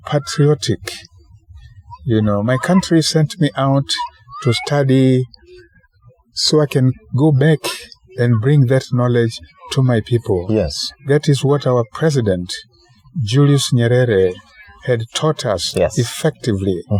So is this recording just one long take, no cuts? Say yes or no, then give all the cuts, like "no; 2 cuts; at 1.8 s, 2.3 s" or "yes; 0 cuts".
yes; 0 cuts